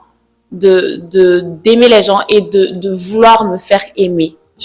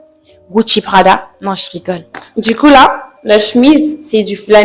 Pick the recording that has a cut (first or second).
second